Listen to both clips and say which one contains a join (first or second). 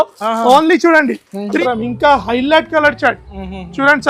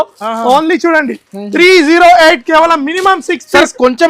first